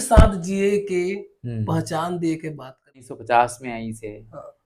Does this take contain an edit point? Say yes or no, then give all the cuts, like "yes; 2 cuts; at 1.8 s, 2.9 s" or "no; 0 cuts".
yes; 1 cut; at 3.1 s